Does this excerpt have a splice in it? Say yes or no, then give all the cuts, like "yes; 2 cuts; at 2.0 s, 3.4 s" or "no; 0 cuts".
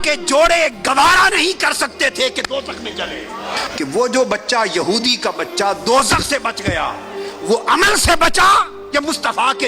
yes; 1 cut; at 3.6 s